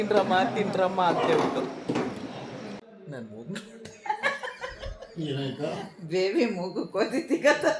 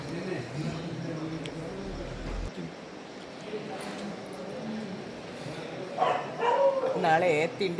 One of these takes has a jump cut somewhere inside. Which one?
first; 1 cut; at 2.8 s

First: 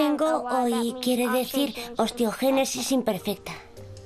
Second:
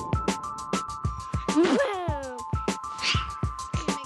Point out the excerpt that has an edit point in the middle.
first; 1 cut; at 2.2 s

